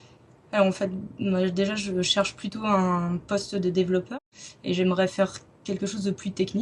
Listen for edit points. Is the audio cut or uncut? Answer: cut